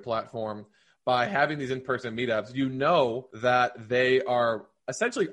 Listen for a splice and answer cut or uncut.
cut